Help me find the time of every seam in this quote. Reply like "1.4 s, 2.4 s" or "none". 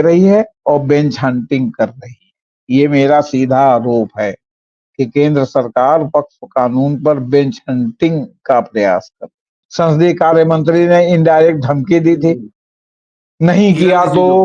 9.6 s